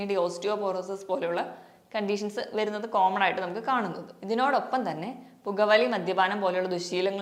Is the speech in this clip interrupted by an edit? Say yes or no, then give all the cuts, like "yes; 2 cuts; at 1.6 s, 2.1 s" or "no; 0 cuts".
no; 0 cuts